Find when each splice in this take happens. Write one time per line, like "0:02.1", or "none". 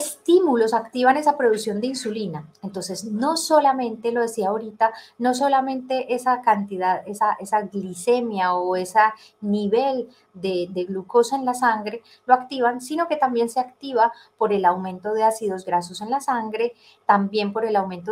none